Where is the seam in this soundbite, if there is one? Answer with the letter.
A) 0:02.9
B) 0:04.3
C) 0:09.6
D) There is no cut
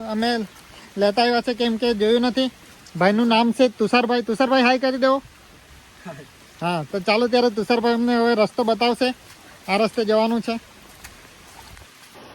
D